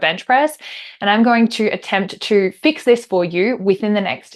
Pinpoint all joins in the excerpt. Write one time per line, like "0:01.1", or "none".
none